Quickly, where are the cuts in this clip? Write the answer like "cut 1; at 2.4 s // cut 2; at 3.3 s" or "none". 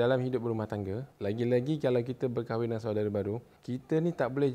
cut 1; at 1.1 s // cut 2; at 3.5 s